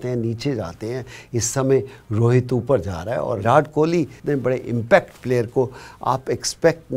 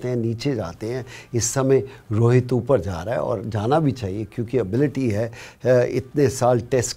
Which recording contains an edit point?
first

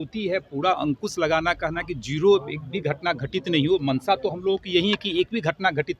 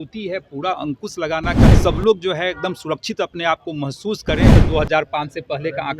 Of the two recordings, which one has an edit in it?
second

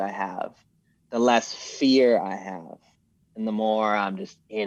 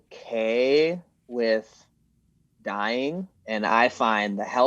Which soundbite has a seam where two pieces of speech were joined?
second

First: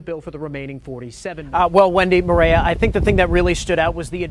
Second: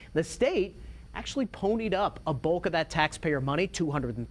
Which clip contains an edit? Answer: first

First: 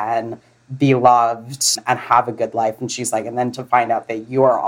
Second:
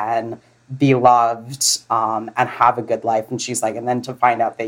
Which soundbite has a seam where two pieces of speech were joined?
first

